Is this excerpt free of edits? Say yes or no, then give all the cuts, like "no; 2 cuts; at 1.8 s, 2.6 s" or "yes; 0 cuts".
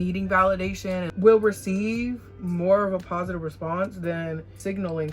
no; 2 cuts; at 1.1 s, 4.4 s